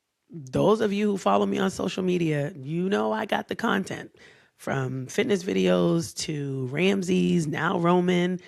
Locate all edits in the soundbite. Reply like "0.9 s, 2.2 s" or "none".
none